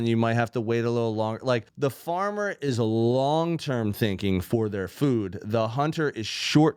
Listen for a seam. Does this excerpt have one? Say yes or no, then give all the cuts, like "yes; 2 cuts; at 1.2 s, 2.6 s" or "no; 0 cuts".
yes; 1 cut; at 1.7 s